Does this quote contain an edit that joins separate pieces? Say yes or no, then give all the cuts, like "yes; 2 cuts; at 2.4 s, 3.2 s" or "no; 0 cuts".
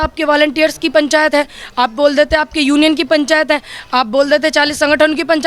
no; 0 cuts